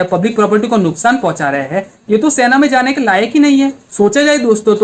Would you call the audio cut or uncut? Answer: cut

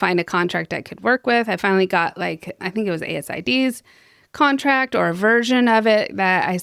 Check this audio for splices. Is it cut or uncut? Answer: cut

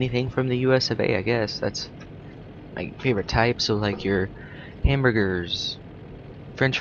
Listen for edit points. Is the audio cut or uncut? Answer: cut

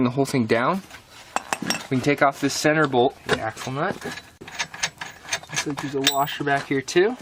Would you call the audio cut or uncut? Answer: cut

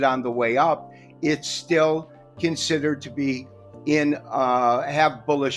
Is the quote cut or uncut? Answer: uncut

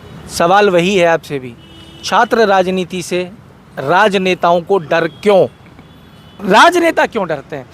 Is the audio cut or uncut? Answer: cut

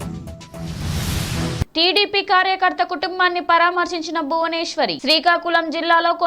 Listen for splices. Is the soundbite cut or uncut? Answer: cut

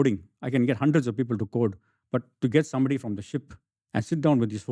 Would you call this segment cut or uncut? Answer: uncut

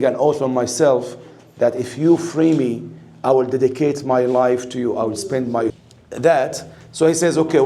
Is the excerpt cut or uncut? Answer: cut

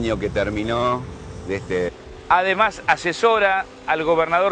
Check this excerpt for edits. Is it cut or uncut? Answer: uncut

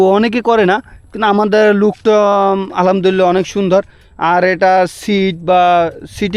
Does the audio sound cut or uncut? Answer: uncut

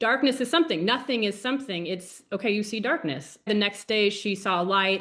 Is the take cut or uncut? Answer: uncut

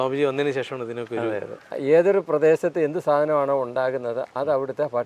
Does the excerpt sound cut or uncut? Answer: cut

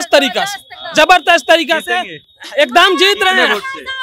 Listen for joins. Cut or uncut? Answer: uncut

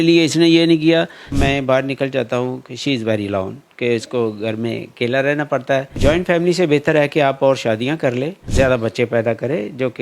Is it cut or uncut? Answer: cut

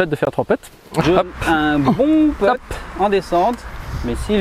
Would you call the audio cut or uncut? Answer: cut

